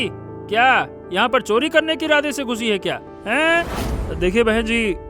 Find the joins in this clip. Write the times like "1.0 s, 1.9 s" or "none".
3.8 s

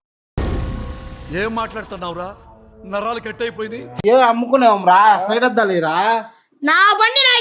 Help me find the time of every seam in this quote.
4.0 s

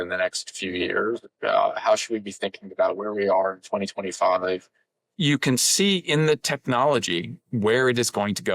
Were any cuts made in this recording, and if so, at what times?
1.2 s, 4.6 s

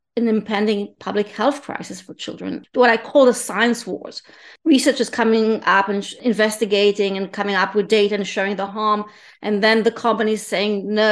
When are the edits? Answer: 2.6 s, 4.9 s, 6.2 s

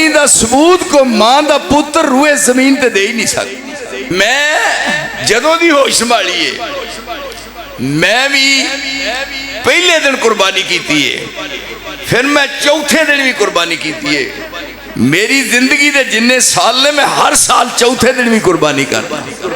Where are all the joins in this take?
4.1 s

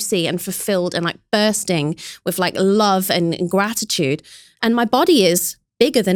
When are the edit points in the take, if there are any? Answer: none

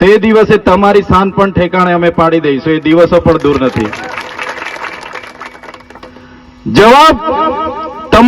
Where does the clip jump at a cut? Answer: none

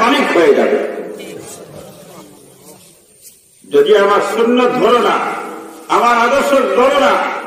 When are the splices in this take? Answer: 1.8 s

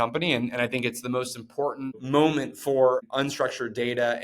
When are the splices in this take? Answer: 2.0 s, 3.0 s

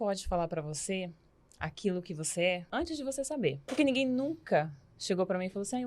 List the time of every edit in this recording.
2.6 s, 3.7 s

